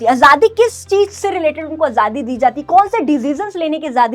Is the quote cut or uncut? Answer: uncut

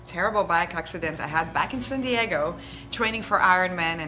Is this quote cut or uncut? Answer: uncut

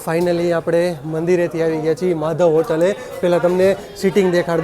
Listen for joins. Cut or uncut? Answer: uncut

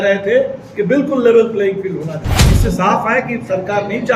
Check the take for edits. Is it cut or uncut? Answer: cut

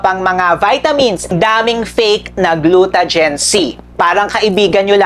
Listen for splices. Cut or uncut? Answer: cut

